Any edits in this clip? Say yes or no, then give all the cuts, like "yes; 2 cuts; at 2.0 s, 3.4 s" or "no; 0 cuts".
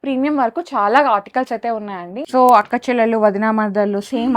yes; 1 cut; at 2.1 s